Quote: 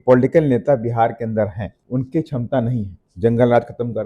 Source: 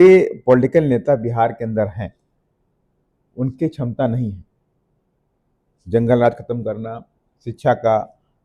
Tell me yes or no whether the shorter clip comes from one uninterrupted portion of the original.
no